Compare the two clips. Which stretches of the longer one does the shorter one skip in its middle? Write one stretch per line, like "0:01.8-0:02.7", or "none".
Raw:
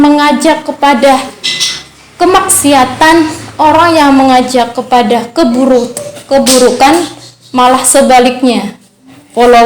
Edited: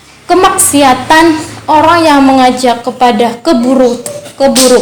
none